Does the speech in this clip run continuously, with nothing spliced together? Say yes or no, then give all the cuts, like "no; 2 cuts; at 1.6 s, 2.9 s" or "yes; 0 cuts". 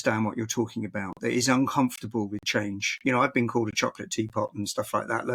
yes; 0 cuts